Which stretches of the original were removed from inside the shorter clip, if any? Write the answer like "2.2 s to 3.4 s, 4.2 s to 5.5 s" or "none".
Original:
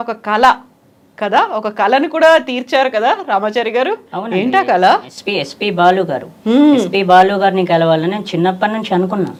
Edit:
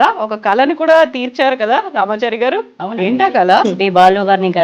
5.0 s to 6.8 s